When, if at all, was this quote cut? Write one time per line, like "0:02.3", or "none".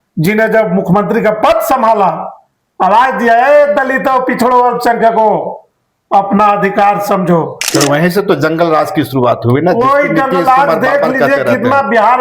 0:07.6